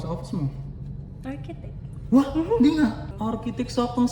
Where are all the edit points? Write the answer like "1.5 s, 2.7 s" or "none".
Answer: 3.1 s